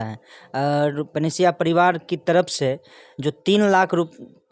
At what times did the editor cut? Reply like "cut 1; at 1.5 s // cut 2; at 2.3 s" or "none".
none